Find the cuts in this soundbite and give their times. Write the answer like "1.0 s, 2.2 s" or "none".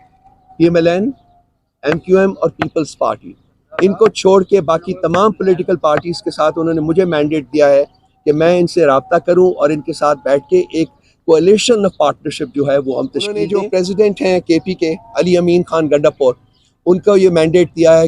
13.5 s